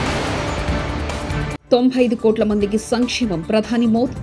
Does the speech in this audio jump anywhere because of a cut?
yes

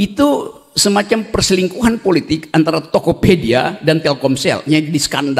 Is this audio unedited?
yes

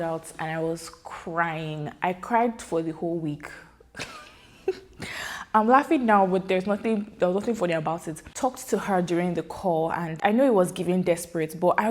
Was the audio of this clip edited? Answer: yes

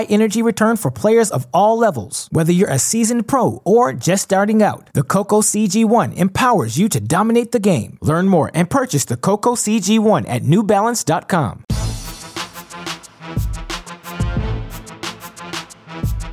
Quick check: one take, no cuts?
no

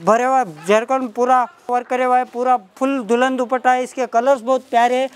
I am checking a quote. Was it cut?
no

